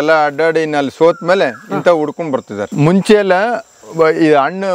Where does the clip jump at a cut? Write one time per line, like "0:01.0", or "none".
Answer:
0:02.6